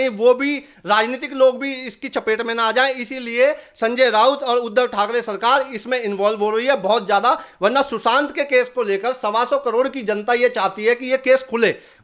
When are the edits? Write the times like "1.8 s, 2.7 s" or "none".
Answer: none